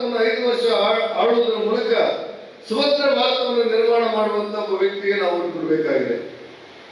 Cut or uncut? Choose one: uncut